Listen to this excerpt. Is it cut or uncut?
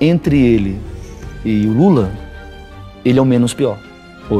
uncut